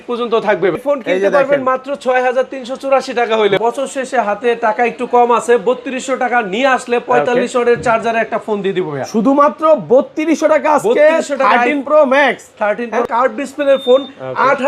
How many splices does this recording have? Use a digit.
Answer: 3